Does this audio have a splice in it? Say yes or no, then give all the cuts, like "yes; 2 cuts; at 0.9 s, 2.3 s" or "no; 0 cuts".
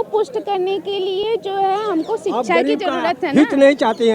no; 0 cuts